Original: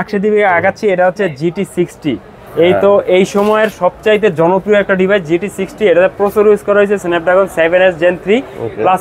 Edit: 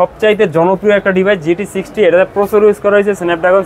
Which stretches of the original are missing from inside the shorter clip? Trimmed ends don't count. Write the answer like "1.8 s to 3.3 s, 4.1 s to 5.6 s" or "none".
none